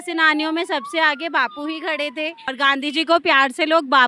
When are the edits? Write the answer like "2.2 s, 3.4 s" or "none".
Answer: 2.5 s